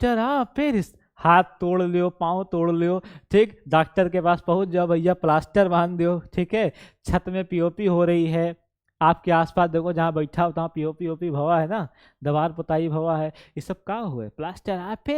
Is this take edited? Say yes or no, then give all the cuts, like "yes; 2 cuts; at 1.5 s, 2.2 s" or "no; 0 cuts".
no; 0 cuts